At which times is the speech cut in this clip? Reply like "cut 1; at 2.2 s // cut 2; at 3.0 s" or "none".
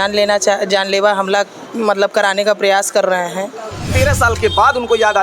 cut 1; at 3.9 s

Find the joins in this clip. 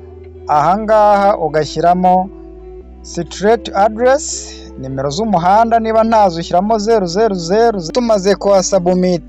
cut 1; at 7.9 s

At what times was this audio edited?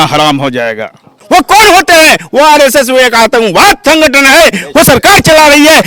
cut 1; at 1.2 s

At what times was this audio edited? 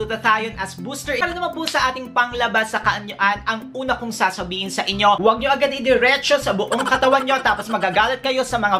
cut 1; at 1.2 s // cut 2; at 5.2 s

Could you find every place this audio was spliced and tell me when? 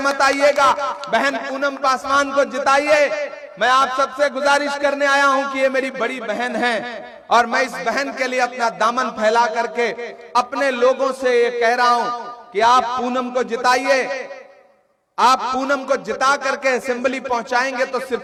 none

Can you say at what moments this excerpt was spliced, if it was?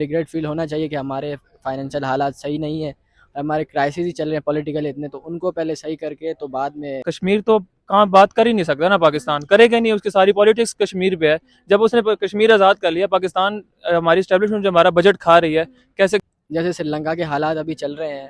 cut 1; at 7.0 s // cut 2; at 16.2 s

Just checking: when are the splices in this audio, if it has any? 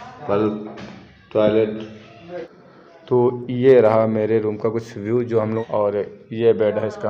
cut 1; at 2.6 s // cut 2; at 5.6 s

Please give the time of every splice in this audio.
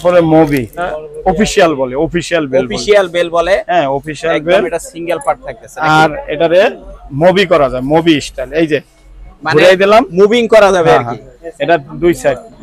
cut 1; at 1.0 s

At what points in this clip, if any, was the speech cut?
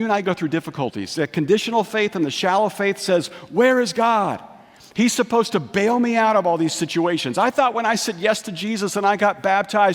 none

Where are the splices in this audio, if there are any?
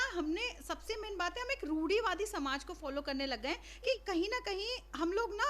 cut 1; at 3.9 s

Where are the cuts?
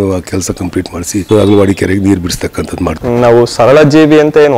cut 1; at 1.2 s // cut 2; at 3.0 s

